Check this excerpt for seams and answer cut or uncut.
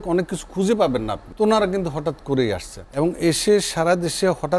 cut